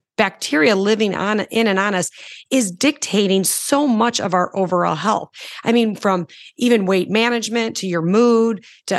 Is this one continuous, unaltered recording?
yes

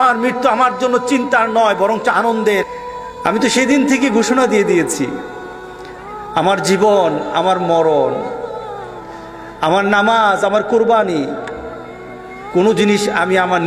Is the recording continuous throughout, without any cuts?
no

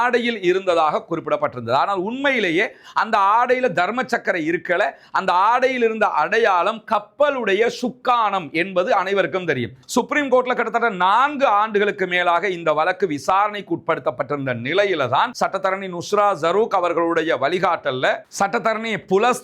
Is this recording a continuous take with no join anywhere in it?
no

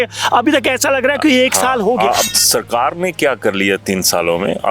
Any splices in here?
yes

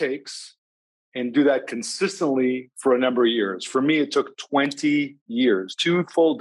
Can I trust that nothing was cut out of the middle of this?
yes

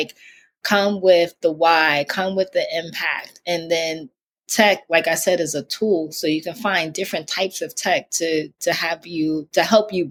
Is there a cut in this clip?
no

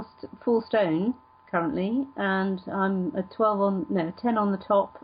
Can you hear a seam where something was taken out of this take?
no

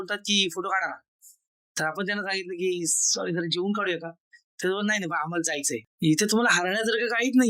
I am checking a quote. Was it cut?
yes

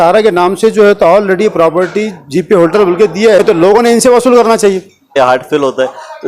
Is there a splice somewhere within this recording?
yes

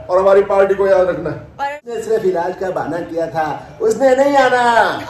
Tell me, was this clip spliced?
yes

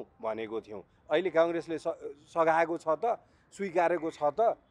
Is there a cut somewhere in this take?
no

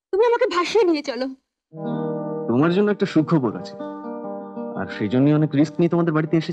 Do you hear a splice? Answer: no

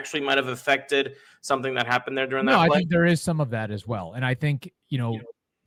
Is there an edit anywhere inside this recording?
no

